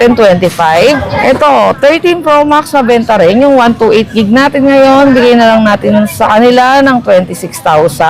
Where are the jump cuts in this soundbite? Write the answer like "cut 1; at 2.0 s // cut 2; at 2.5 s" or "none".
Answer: cut 1; at 1.1 s